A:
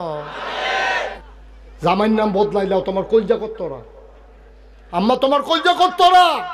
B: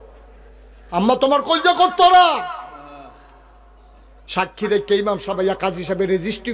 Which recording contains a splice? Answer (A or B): A